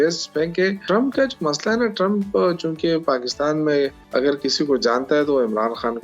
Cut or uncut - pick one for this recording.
cut